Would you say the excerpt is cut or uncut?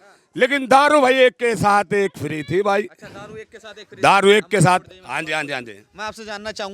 uncut